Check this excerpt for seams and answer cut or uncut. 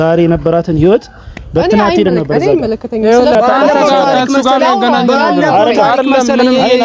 cut